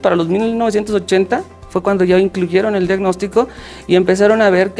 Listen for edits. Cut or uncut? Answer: uncut